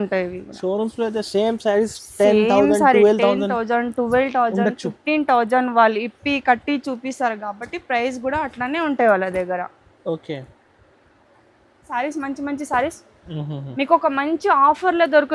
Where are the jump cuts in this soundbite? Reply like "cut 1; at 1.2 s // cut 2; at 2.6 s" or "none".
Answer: cut 1; at 11.9 s